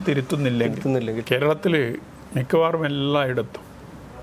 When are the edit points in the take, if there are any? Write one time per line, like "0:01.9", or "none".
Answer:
0:01.2